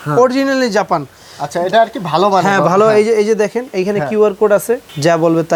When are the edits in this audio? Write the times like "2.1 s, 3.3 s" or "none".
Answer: none